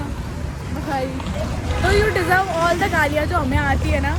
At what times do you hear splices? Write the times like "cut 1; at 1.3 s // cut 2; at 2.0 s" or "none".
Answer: none